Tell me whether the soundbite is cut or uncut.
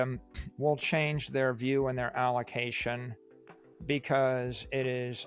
uncut